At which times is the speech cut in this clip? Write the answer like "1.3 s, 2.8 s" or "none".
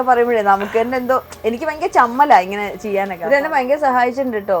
3.2 s